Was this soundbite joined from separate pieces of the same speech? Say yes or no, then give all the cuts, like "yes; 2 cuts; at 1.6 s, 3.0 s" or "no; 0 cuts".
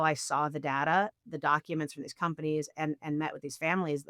no; 0 cuts